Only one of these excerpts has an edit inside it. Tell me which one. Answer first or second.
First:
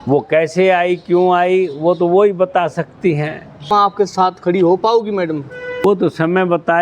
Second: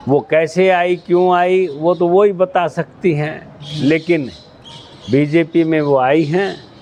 first